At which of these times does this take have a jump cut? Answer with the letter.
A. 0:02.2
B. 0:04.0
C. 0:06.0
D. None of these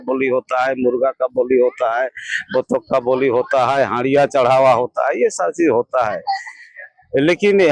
D